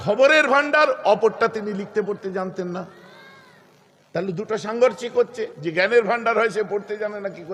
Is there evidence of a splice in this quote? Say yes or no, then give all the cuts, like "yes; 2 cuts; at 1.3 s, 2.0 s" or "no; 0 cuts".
no; 0 cuts